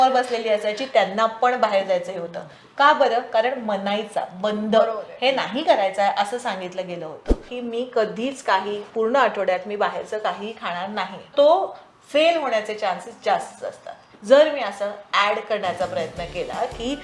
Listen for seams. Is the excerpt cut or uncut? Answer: cut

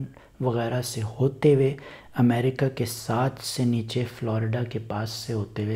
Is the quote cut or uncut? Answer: uncut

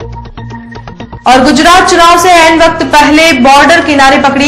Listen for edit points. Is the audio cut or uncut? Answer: cut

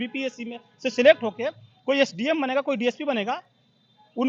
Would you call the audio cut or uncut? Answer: uncut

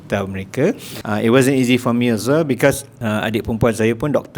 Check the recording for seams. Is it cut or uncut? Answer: cut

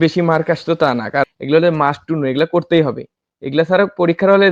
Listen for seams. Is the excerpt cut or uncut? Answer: cut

